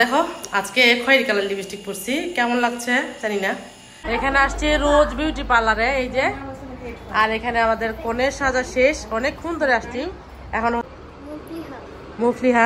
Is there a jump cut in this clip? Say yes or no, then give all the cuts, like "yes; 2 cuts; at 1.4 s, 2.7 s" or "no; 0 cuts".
yes; 2 cuts; at 4.0 s, 10.9 s